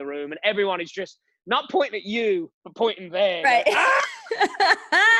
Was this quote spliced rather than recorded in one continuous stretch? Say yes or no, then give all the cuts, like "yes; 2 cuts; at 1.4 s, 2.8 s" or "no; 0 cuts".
no; 0 cuts